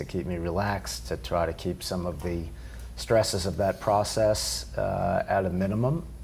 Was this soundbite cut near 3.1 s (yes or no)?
yes